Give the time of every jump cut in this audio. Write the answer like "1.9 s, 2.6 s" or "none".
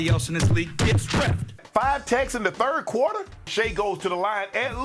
1.5 s